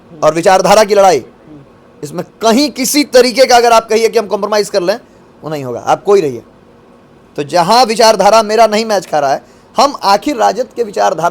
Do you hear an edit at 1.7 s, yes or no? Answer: no